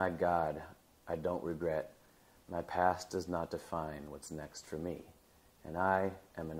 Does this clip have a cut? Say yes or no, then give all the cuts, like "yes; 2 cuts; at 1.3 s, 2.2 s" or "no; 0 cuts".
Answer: no; 0 cuts